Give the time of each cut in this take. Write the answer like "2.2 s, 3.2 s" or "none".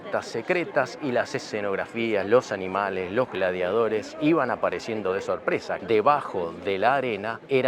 5.8 s